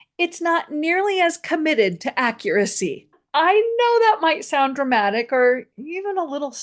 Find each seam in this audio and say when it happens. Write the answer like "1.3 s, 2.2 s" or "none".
3.2 s